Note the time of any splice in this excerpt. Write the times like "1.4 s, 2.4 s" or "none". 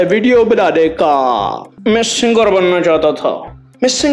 1.7 s